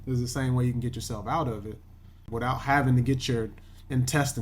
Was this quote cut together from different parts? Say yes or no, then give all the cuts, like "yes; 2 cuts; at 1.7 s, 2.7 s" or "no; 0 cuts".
yes; 1 cut; at 2.2 s